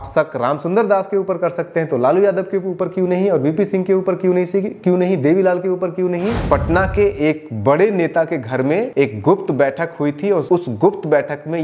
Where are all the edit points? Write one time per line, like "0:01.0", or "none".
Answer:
0:06.4
0:08.9
0:10.4